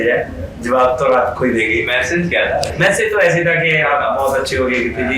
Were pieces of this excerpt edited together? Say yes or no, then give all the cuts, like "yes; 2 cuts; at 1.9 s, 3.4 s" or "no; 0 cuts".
no; 0 cuts